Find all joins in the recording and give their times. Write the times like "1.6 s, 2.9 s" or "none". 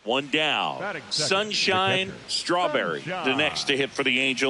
0.8 s, 3.2 s